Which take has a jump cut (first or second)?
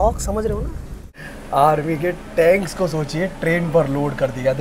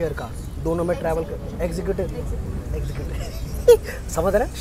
first